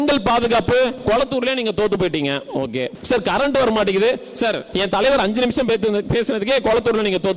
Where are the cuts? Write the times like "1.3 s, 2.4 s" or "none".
1.0 s, 3.0 s, 4.6 s